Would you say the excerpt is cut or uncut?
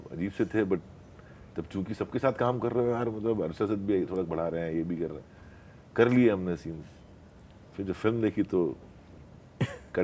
uncut